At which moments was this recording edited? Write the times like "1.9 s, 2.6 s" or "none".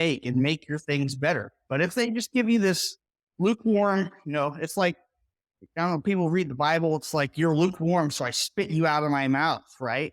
none